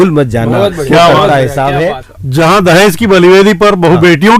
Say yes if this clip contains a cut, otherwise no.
yes